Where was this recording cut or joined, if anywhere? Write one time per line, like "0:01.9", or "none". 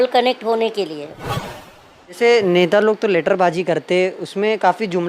0:01.5